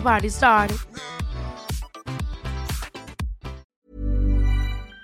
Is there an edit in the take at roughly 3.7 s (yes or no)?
yes